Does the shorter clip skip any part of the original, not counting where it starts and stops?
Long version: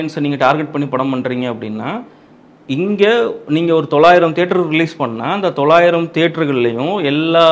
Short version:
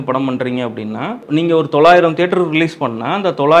yes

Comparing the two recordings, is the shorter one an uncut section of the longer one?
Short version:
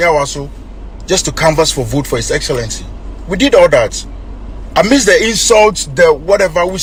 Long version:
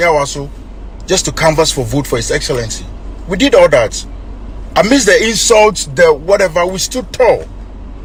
yes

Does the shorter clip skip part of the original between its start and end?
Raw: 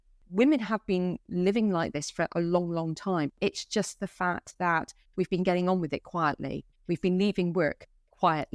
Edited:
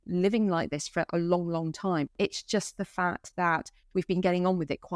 no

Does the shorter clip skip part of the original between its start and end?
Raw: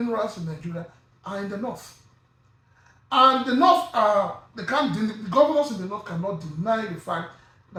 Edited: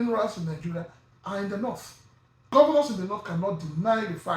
yes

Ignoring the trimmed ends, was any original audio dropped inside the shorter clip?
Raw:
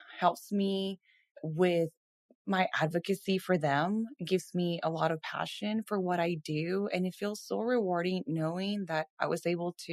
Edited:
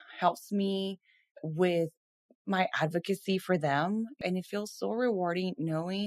yes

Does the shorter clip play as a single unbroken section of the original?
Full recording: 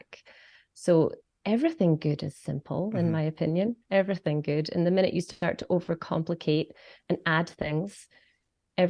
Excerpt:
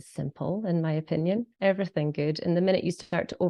yes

